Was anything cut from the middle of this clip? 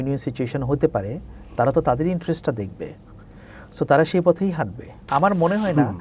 yes; 1 cut; at 5.1 s

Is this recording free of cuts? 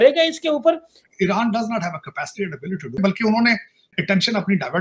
no; 2 cuts; at 2.9 s, 3.9 s

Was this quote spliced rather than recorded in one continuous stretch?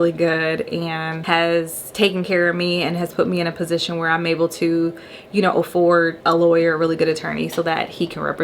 yes; 3 cuts; at 1.1 s, 1.8 s, 6.2 s

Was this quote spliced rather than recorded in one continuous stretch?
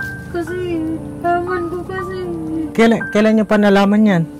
yes; 1 cut; at 2.7 s

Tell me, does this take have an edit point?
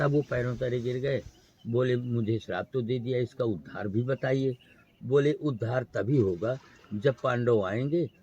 no; 0 cuts

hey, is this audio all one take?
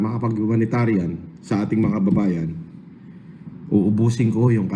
yes; 0 cuts

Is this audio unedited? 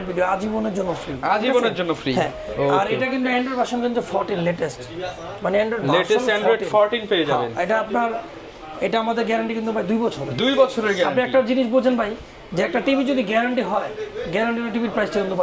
yes; 0 cuts

